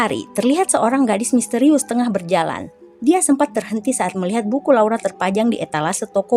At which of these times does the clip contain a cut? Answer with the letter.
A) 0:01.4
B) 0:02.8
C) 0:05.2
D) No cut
D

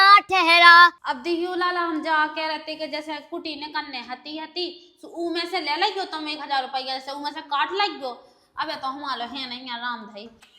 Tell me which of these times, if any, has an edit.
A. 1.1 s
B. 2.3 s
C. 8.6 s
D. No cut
A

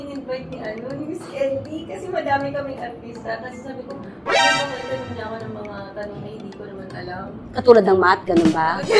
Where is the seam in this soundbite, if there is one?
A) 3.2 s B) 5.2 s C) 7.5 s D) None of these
D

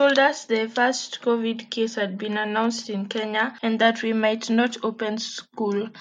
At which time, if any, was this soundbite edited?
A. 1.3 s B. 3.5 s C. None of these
B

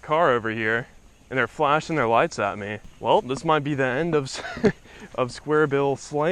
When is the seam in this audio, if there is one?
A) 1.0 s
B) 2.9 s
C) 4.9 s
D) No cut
B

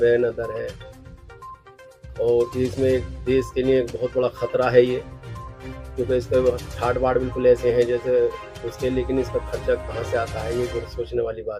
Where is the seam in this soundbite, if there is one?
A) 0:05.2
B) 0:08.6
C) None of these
C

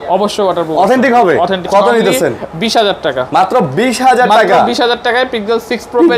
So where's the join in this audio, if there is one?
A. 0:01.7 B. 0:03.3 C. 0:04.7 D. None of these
A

